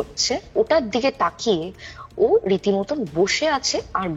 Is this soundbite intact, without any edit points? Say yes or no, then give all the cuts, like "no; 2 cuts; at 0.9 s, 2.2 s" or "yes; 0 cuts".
yes; 0 cuts